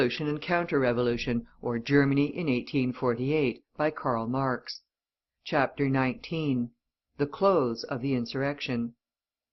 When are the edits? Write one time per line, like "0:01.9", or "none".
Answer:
none